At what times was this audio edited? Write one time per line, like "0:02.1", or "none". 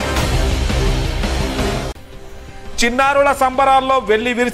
0:02.1